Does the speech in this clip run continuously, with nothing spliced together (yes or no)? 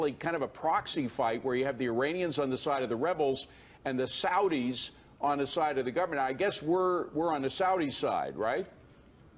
no